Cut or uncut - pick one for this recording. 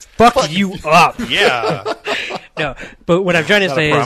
uncut